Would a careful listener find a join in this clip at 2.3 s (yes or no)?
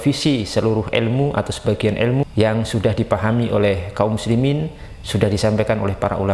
yes